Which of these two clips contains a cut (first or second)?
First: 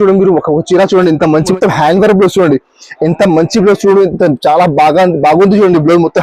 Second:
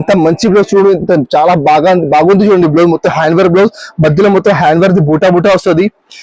first